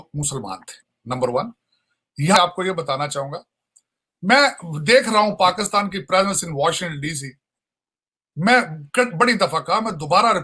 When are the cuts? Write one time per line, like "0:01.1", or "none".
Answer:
0:02.4